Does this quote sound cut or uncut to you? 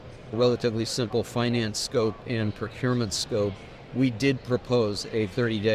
uncut